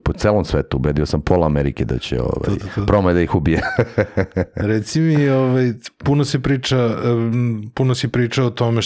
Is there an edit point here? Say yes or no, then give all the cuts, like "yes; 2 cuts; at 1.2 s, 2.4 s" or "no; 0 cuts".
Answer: no; 0 cuts